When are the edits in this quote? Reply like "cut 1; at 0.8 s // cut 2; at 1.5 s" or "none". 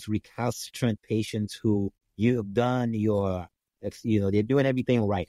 cut 1; at 2.0 s